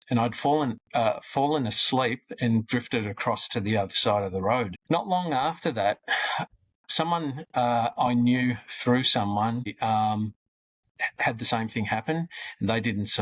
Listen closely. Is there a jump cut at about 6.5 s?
no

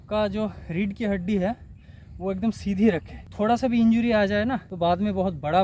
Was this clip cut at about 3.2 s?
yes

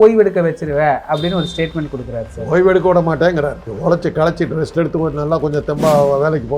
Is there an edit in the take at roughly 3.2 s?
no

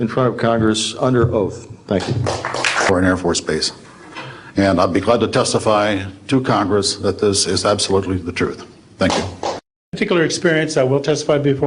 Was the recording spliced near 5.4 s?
no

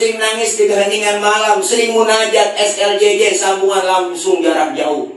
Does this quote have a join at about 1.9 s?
no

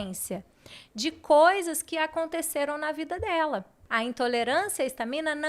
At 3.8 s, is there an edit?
yes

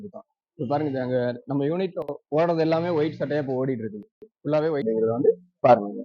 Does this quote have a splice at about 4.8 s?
yes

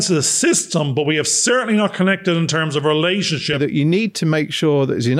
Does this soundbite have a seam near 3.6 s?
yes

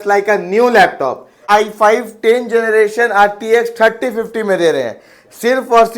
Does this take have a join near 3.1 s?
no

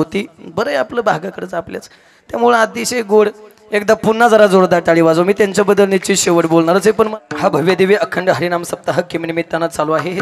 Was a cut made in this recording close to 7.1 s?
yes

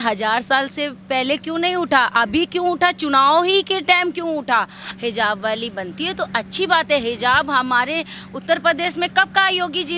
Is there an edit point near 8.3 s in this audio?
no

